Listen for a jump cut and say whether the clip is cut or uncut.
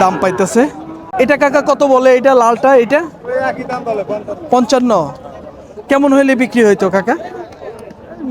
cut